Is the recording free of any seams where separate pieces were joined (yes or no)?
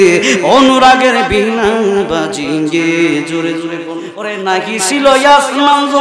no